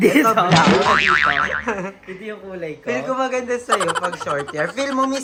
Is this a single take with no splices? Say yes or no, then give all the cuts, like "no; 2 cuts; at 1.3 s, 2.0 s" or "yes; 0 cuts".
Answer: yes; 0 cuts